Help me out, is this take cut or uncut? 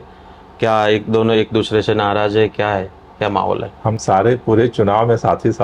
uncut